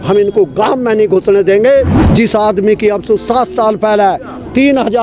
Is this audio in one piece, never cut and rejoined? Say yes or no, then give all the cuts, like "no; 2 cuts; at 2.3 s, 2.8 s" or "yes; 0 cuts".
no; 1 cut; at 2.0 s